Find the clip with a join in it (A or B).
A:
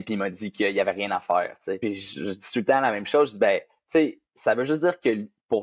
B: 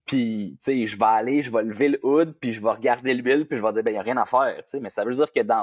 A